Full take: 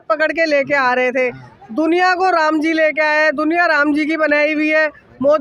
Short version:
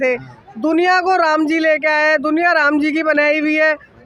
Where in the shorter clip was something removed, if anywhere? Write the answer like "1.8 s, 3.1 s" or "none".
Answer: none

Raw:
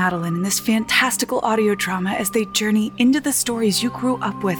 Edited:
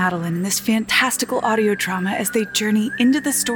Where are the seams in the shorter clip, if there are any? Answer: none

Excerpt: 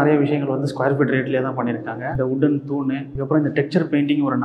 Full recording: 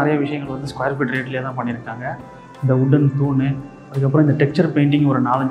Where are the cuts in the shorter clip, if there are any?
2.1 s, 3.1 s

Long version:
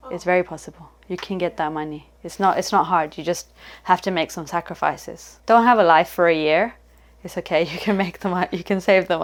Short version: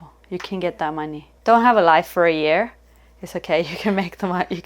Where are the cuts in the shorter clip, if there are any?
1.2 s

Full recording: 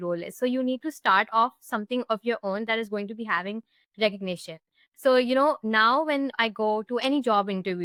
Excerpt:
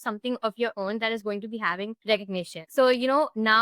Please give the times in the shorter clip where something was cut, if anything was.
2.2 s

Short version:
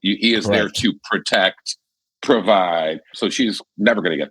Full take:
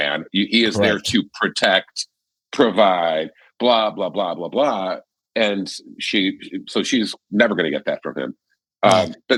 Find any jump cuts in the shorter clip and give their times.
3.1 s

